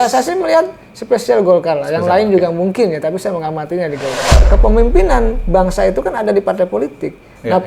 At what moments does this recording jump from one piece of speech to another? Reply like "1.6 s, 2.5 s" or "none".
4.5 s